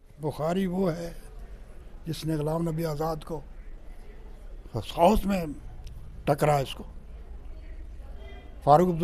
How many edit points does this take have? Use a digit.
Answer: 0